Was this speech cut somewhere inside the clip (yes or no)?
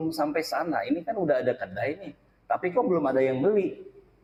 no